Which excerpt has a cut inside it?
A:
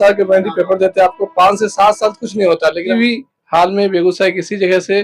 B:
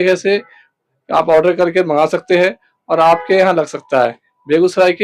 A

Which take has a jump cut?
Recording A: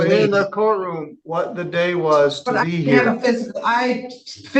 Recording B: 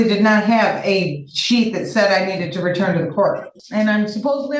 B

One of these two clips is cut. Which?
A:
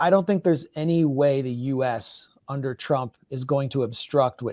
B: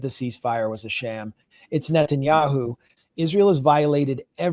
B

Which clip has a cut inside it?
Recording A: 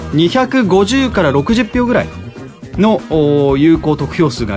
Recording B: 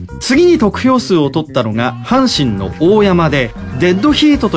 A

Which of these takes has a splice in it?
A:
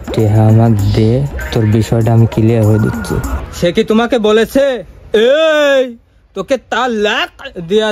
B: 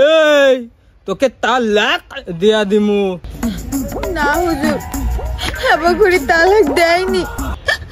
A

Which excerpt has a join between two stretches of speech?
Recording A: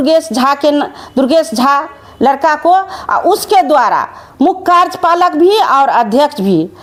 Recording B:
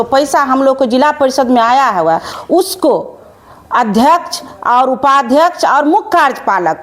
B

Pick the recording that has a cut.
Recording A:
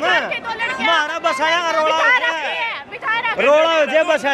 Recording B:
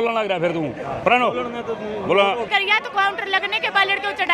B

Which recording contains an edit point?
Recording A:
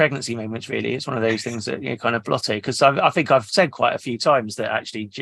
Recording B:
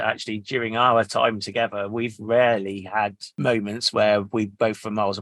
B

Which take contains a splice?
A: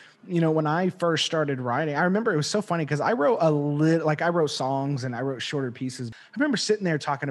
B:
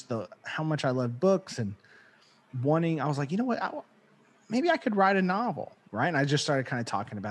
A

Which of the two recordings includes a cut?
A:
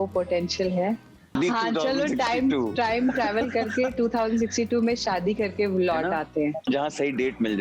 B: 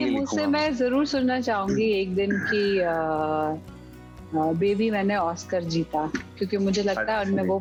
A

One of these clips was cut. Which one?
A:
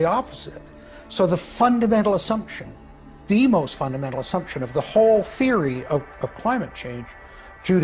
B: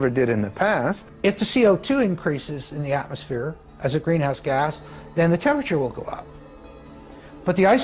B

